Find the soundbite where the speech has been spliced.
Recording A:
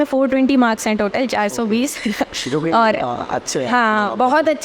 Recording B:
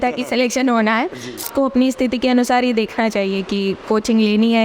B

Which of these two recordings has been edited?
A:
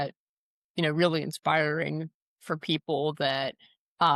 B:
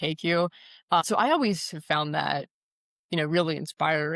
B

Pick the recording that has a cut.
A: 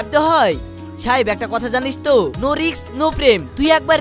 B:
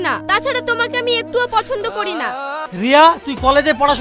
B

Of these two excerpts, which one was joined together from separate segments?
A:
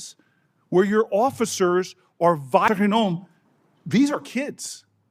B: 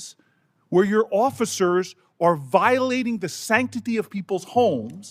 A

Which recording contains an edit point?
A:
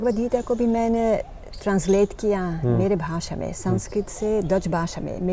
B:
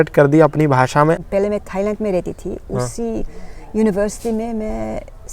B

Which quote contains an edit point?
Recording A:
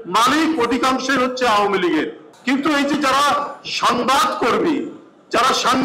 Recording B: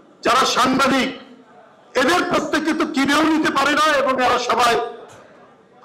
A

